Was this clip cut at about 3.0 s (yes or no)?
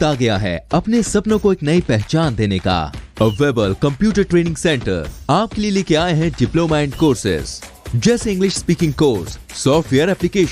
no